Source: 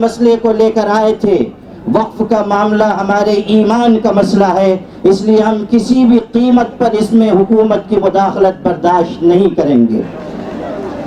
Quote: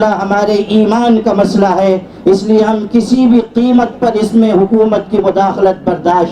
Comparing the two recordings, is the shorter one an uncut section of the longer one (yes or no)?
yes